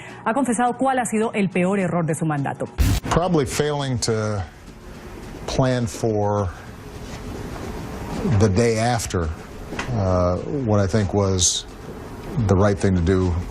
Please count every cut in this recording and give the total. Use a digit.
0